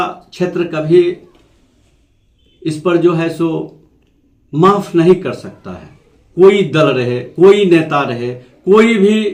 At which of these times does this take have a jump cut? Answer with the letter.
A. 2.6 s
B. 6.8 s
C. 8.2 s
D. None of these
D